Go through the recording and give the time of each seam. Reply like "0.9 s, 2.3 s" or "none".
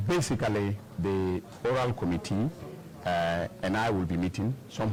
none